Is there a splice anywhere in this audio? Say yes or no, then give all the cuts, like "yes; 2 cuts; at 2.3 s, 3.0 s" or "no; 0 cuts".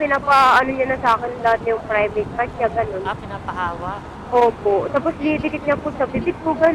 no; 0 cuts